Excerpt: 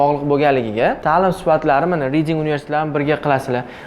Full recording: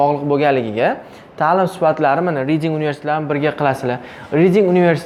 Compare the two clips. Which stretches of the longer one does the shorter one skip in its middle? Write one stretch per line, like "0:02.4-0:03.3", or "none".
0:01.0-0:01.3

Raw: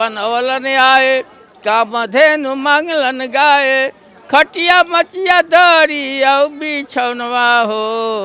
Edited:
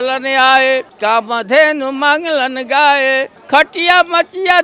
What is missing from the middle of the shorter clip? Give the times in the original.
0:01.3-0:01.5
0:04.0-0:04.1

